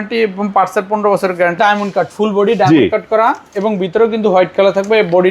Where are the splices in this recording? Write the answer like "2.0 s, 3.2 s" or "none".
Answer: 1.6 s